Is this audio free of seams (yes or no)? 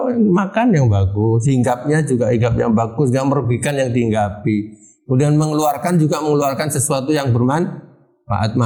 yes